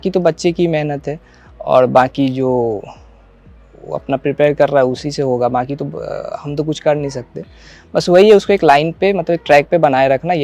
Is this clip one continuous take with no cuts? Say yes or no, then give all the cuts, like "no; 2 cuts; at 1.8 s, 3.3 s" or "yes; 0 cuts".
yes; 0 cuts